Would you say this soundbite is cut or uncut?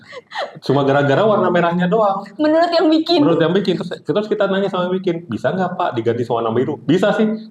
uncut